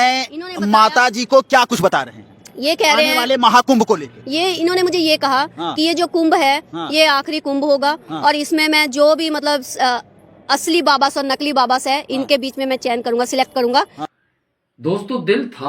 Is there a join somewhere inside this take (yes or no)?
yes